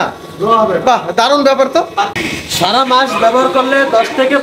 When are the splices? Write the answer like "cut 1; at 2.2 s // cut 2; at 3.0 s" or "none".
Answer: cut 1; at 2.2 s